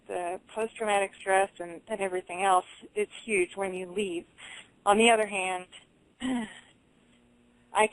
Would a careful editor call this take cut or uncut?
cut